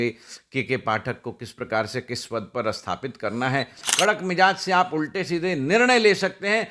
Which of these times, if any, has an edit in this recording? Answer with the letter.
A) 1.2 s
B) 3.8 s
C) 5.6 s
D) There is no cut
B